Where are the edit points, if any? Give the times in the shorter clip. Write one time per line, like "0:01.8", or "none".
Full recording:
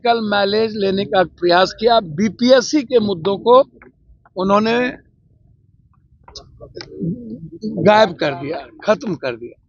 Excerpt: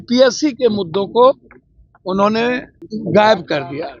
0:02.8